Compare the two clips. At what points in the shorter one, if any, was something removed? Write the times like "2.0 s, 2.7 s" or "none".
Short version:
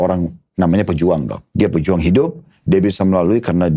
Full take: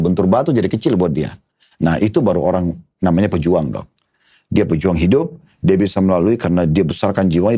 1.4 s